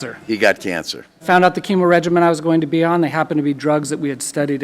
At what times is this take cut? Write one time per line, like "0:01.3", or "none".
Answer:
0:01.2